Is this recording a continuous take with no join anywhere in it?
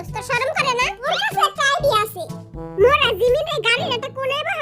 no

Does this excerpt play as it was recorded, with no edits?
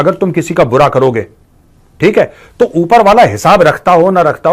yes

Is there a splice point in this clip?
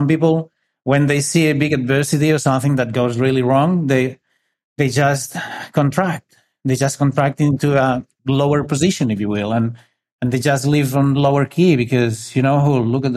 yes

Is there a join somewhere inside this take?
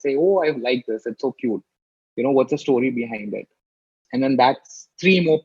yes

